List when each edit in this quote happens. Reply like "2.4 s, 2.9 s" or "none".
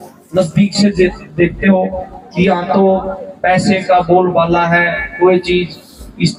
none